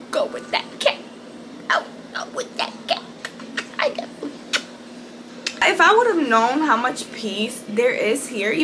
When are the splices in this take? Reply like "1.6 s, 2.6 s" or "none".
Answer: none